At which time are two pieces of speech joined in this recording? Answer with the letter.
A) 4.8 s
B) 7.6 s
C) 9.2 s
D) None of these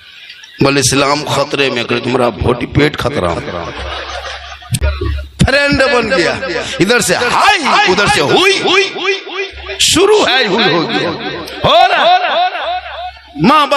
A